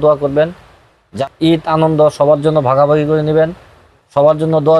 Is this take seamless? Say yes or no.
no